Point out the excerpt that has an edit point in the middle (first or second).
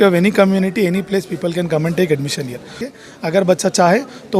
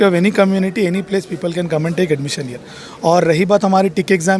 first